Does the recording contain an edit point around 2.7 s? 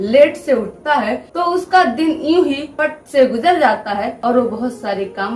yes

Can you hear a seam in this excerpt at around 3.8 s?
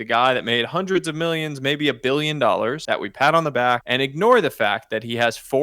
yes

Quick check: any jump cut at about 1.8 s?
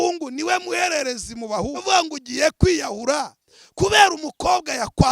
yes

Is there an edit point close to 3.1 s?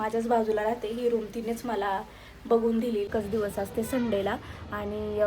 yes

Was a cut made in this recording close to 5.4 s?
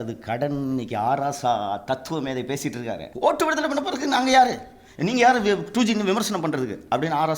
no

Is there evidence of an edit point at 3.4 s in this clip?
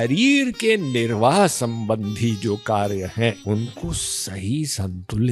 yes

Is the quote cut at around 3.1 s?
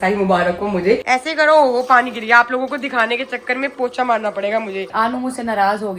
no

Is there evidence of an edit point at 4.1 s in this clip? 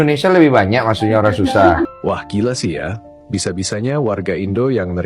no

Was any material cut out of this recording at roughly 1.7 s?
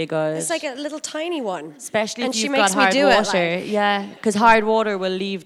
no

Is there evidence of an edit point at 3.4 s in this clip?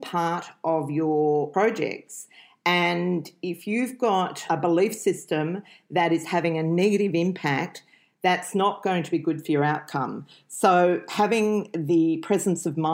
no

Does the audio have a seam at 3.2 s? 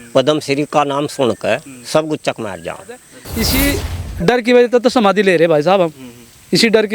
yes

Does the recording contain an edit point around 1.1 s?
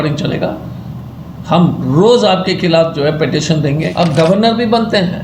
no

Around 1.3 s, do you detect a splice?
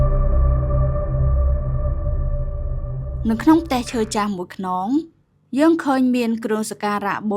no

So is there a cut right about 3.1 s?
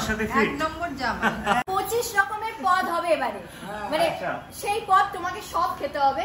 no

